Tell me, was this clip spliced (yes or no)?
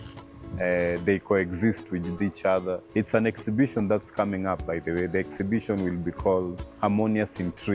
yes